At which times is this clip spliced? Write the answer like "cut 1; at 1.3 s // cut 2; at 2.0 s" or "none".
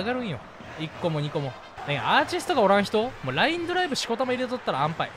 cut 1; at 1.7 s